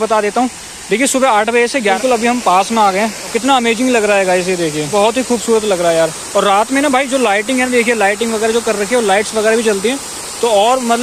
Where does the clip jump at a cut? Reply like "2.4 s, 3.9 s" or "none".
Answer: 2.0 s, 3.3 s, 4.8 s